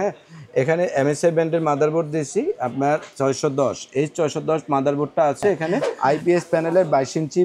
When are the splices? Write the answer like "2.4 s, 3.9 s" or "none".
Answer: 5.9 s